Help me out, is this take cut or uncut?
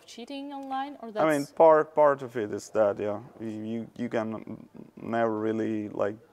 uncut